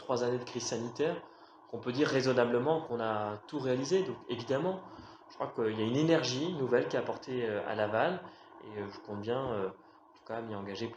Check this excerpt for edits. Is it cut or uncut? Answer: cut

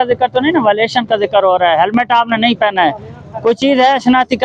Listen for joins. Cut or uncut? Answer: uncut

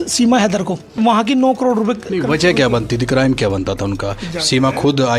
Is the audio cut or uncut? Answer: cut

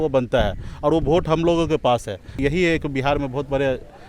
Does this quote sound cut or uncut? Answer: cut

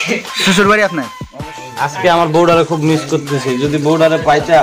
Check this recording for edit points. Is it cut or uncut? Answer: cut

